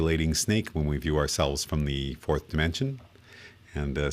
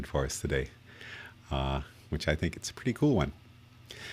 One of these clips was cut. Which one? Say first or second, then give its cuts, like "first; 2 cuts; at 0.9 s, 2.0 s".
second; 1 cut; at 2.7 s